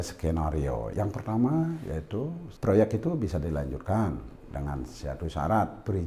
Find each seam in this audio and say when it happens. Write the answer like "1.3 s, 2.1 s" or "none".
0.9 s, 2.4 s